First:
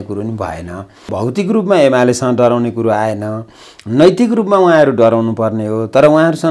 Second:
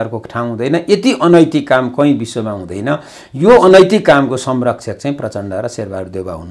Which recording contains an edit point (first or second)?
first